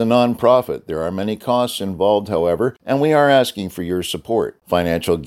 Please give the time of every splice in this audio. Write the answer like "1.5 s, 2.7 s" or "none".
2.8 s